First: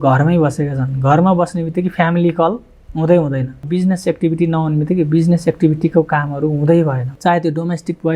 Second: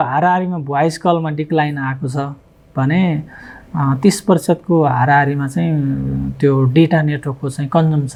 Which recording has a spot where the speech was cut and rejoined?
first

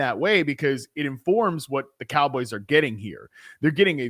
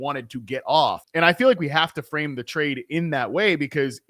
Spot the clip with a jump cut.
second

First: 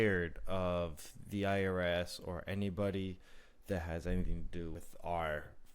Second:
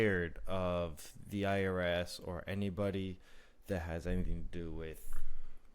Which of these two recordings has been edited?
first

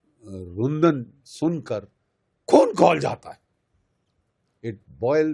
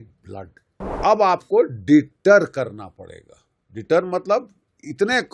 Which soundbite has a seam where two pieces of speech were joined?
second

